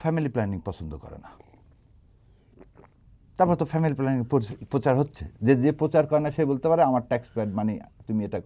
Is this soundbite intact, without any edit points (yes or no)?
yes